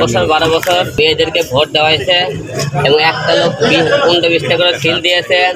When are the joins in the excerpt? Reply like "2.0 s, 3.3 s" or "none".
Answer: 0.9 s